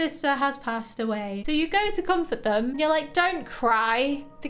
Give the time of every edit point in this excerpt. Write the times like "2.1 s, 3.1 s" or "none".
none

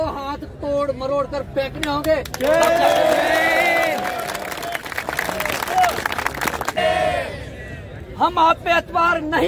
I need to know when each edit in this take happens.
6.8 s

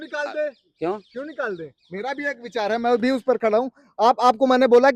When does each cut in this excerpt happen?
none

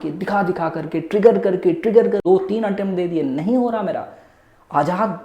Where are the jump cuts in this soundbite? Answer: 2.2 s

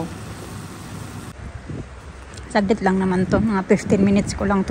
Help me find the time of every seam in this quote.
1.3 s

